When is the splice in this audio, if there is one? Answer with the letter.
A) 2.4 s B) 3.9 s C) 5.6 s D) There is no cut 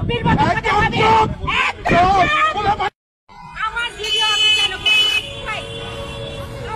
D